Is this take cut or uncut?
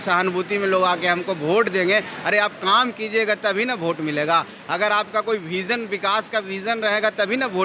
uncut